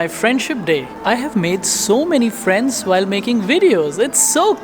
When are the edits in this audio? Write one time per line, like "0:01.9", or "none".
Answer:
0:00.9